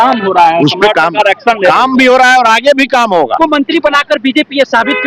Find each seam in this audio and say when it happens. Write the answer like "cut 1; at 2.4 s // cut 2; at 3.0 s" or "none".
cut 1; at 3.4 s

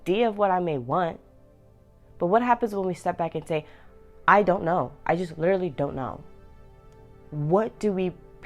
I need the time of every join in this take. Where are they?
none

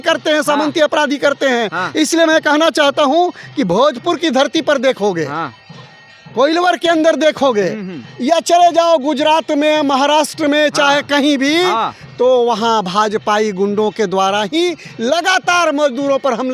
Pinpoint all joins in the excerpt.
none

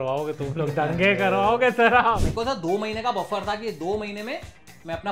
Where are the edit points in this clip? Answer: cut 1; at 2.2 s

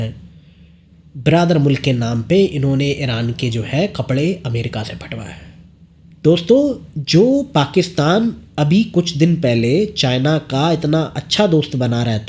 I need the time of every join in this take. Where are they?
none

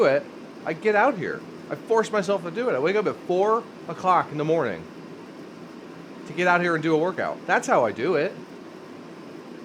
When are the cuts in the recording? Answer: none

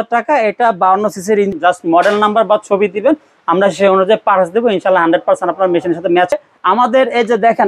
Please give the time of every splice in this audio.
cut 1; at 1.5 s // cut 2; at 6.3 s

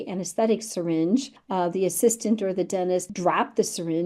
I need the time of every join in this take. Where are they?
cut 1; at 1.4 s // cut 2; at 3.1 s

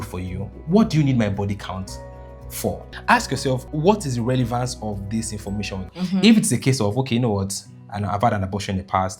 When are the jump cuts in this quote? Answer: cut 1; at 3.1 s // cut 2; at 5.9 s

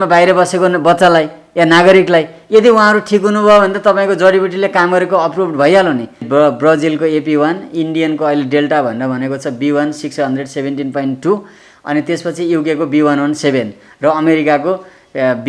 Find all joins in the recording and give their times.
cut 1; at 6.3 s

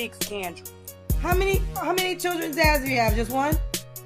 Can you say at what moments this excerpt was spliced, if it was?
none

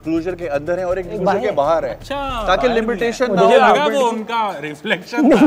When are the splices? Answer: none

